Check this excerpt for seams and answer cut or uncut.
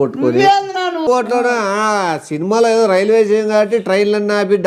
cut